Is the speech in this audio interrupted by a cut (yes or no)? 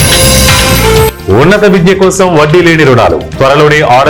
no